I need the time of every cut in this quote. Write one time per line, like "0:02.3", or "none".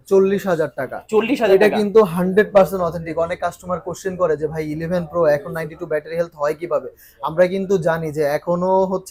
none